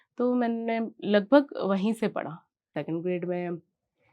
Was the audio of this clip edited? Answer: yes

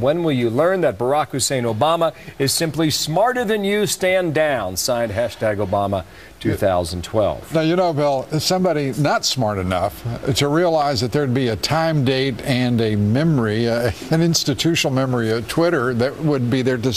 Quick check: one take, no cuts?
no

